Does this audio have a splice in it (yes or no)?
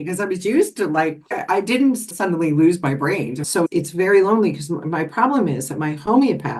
yes